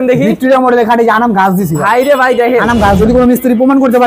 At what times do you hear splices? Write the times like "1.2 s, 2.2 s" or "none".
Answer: 3.0 s